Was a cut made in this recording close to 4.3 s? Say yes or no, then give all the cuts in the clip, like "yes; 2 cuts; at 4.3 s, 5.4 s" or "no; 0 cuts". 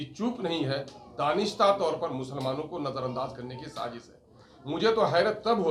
no; 0 cuts